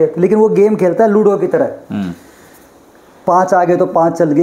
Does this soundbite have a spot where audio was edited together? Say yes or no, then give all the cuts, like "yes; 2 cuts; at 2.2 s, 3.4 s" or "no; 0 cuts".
no; 0 cuts